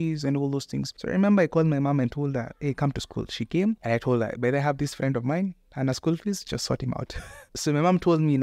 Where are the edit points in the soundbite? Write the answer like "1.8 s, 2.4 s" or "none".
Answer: 0.9 s, 3.8 s